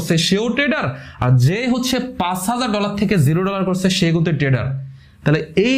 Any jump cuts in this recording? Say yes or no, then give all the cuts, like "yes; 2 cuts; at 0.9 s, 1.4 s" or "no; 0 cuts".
no; 0 cuts